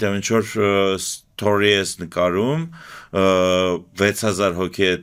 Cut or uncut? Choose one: uncut